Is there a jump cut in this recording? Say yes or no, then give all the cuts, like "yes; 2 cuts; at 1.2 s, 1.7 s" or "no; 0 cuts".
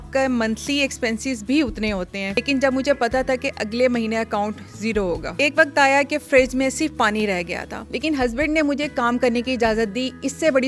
yes; 3 cuts; at 2.3 s, 5.3 s, 7.7 s